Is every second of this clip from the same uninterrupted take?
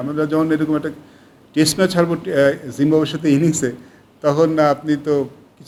yes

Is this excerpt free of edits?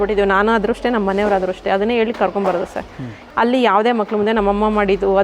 no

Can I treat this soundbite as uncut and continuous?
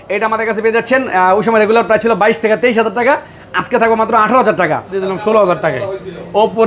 no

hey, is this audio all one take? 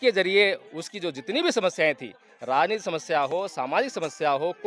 yes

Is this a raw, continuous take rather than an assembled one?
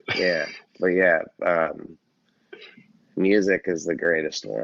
yes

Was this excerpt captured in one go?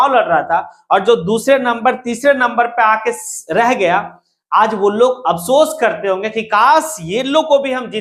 yes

